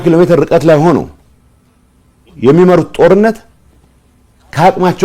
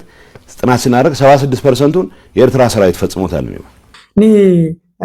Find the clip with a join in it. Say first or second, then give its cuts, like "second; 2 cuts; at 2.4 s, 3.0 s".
second; 1 cut; at 3.9 s